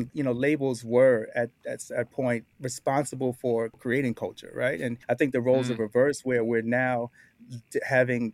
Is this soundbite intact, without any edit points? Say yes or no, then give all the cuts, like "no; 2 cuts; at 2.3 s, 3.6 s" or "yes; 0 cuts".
no; 3 cuts; at 2.5 s, 3.8 s, 5.0 s